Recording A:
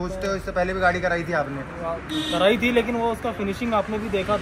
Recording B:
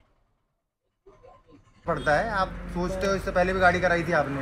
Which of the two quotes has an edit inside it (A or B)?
B